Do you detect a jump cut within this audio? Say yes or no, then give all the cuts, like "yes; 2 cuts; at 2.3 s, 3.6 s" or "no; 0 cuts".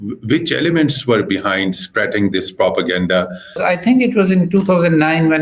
yes; 1 cut; at 3.6 s